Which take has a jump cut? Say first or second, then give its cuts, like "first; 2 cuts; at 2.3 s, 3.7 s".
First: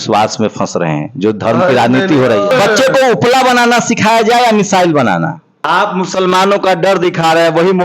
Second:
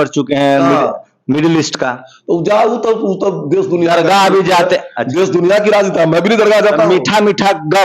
first; 2 cuts; at 2.5 s, 5.6 s